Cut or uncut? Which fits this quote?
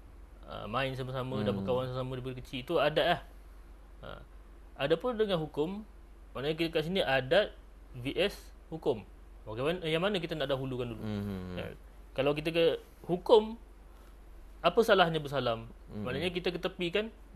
uncut